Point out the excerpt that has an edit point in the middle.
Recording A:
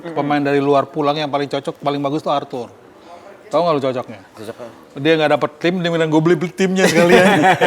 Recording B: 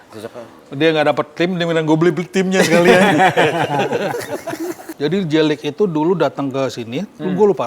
B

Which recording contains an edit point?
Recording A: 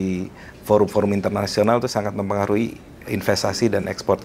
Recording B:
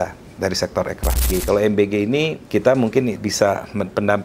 B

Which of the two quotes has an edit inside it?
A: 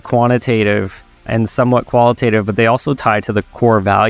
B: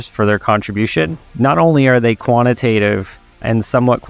B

